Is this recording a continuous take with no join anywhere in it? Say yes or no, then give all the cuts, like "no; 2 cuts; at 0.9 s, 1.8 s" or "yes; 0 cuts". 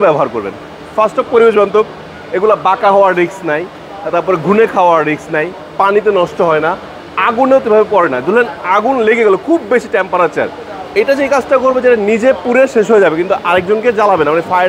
yes; 0 cuts